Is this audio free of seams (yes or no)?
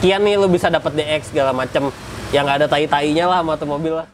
yes